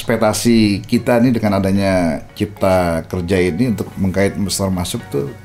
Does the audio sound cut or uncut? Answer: uncut